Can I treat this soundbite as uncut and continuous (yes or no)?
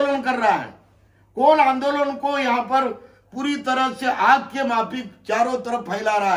yes